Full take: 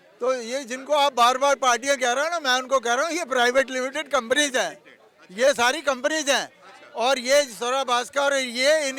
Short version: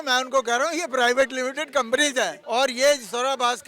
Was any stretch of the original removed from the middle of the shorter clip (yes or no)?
yes